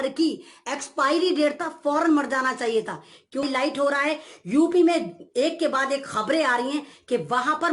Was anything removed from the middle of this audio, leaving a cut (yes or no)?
yes